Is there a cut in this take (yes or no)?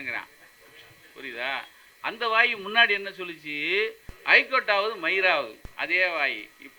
yes